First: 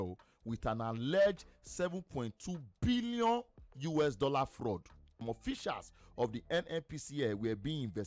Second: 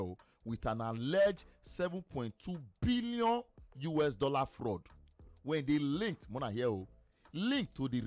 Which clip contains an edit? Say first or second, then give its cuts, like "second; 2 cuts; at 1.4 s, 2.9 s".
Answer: first; 1 cut; at 5.2 s